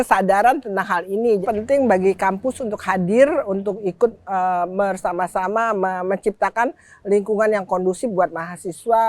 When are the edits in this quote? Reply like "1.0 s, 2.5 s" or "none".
1.4 s